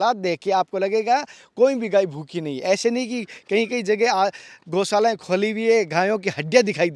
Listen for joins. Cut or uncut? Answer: uncut